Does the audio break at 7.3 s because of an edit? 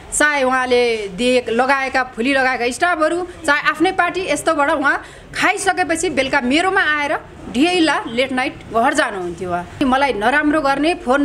no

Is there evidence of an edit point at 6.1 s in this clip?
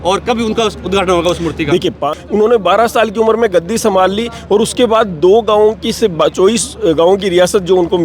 no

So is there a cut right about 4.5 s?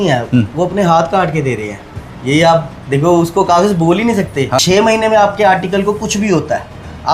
yes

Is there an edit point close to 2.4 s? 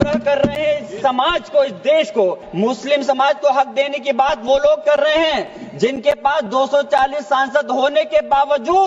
yes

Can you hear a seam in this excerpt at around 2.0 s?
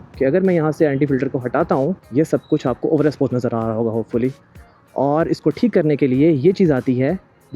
yes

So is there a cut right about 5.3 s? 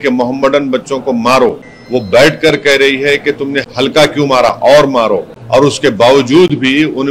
yes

